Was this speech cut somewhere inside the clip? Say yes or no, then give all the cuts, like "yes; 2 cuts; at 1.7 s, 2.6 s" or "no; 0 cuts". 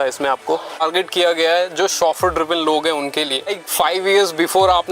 yes; 2 cuts; at 0.8 s, 3.6 s